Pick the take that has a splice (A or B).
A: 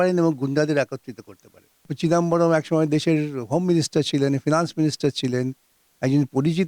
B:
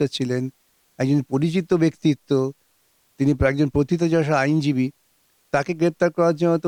A